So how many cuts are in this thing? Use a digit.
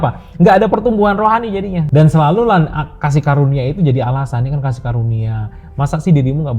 1